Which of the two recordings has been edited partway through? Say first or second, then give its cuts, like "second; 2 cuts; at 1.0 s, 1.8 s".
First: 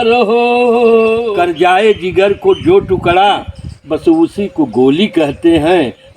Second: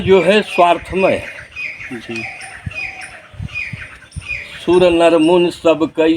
first; 1 cut; at 1.2 s